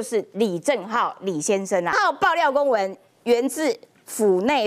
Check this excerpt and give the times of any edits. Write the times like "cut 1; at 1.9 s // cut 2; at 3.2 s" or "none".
cut 1; at 1.9 s

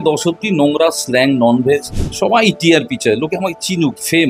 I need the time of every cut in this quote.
cut 1; at 2.0 s

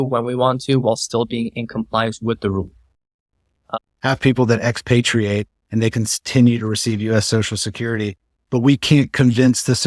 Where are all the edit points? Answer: cut 1; at 3.8 s

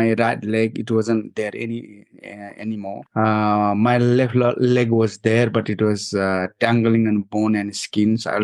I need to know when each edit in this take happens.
cut 1; at 3.0 s

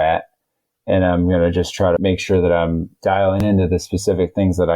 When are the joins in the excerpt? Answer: cut 1; at 2.0 s // cut 2; at 3.4 s

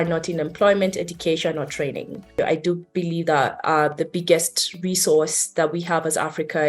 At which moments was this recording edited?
cut 1; at 2.3 s

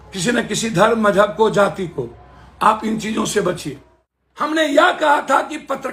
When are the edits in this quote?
cut 1; at 4.5 s

